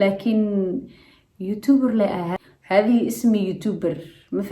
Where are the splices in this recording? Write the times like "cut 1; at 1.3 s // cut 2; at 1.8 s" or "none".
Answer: cut 1; at 2.3 s